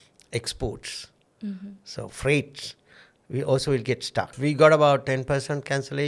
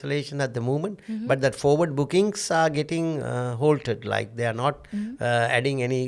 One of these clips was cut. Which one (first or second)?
first